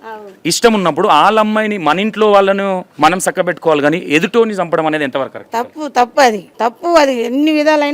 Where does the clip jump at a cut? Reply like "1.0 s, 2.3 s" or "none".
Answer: 2.9 s, 6.5 s